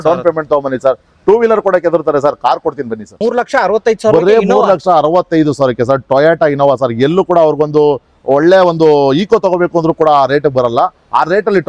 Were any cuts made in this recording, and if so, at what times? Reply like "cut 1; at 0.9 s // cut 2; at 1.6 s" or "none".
cut 1; at 3.0 s